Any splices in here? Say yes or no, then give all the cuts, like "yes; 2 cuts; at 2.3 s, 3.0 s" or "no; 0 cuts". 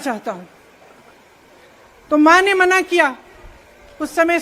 no; 0 cuts